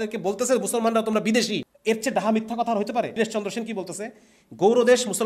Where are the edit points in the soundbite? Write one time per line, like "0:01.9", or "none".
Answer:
0:01.7
0:03.1